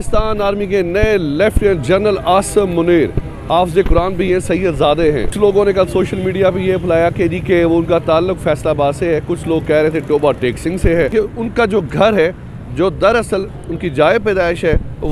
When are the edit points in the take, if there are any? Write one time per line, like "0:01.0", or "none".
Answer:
0:05.3
0:11.1